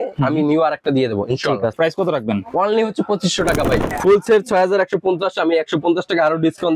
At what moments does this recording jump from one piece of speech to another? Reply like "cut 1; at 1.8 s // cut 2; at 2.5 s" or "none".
cut 1; at 1.7 s // cut 2; at 3.9 s